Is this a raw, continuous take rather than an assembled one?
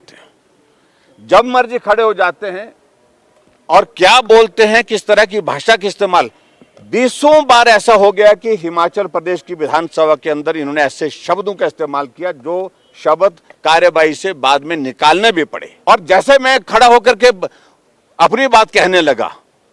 no; 1 cut; at 15.6 s

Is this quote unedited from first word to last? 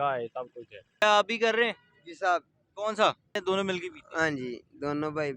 no; 2 cuts; at 1.0 s, 3.4 s

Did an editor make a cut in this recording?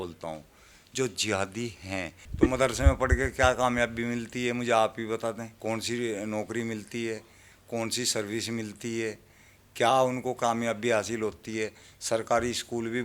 yes; 2 cuts; at 2.2 s, 5.5 s

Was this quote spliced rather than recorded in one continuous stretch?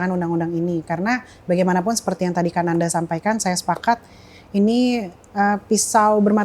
no; 0 cuts

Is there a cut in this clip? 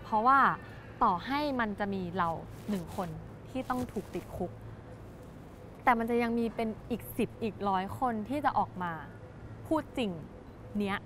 no; 0 cuts

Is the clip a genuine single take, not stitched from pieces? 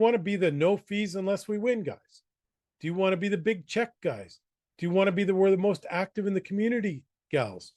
yes; 0 cuts

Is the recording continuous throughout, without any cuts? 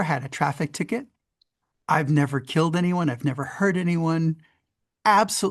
yes; 0 cuts

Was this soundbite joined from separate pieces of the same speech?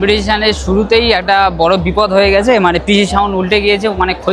no; 0 cuts

